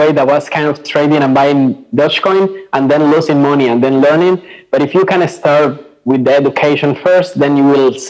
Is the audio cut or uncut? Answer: uncut